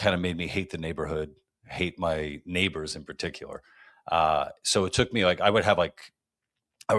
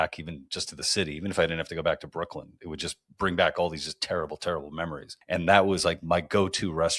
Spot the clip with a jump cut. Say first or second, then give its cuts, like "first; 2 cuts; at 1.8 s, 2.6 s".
second; 1 cut; at 5.1 s